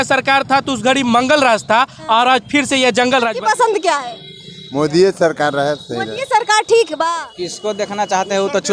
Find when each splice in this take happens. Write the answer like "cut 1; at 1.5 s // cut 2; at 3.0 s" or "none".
cut 1; at 3.3 s // cut 2; at 7.1 s